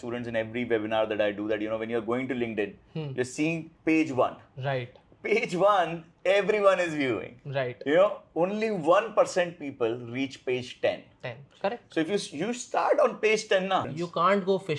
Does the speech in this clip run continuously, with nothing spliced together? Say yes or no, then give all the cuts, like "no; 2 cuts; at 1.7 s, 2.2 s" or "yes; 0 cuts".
no; 1 cut; at 13.9 s